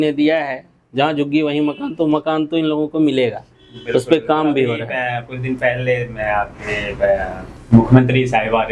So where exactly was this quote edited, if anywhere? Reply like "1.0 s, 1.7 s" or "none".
none